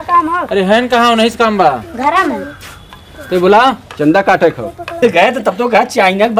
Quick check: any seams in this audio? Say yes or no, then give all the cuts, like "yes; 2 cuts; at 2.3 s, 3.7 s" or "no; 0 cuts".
yes; 1 cut; at 5.0 s